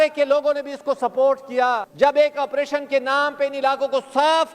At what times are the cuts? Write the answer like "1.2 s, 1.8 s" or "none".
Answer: 1.9 s